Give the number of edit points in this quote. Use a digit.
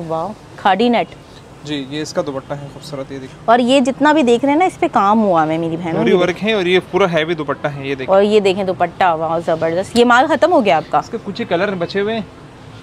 0